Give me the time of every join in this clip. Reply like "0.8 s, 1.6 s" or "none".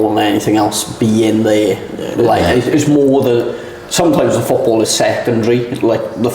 none